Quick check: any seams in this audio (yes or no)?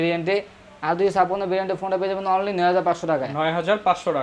no